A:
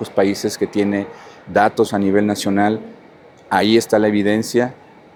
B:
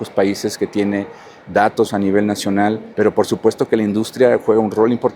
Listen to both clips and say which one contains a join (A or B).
B